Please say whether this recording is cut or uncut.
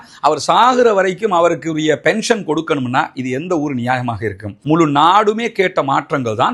cut